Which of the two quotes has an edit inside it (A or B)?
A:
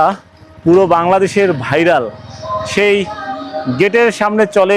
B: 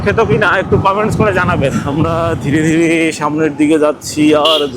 B